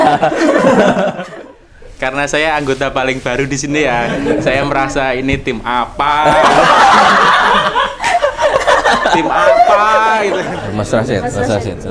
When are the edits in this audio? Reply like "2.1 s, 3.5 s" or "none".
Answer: 1.2 s, 10.3 s